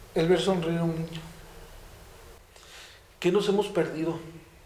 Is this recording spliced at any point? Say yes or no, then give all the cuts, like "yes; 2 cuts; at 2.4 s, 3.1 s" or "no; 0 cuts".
yes; 1 cut; at 2.4 s